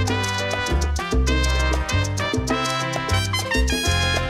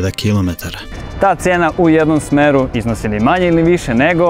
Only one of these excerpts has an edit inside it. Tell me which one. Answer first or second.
second